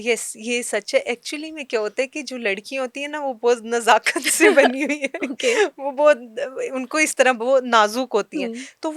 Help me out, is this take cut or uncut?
uncut